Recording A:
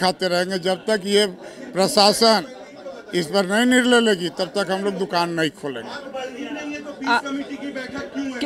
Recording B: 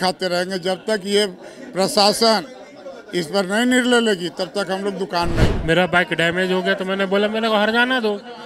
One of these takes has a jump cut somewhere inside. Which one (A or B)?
B